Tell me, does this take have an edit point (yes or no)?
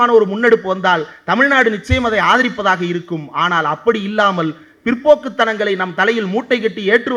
no